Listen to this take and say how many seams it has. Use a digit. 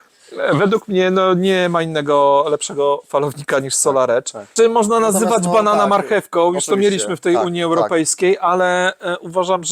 1